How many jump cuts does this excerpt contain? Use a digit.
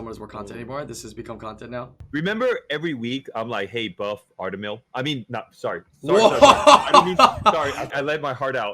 2